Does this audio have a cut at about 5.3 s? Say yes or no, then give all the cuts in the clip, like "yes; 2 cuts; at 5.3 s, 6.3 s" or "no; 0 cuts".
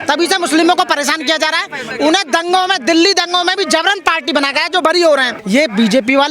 yes; 1 cut; at 5.3 s